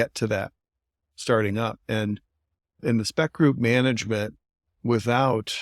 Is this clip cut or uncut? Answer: cut